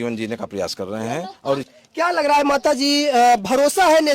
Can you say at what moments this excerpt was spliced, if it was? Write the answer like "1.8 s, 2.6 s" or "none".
1.7 s